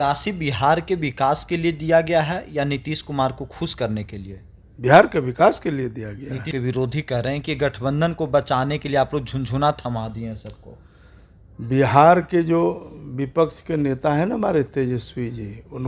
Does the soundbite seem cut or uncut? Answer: cut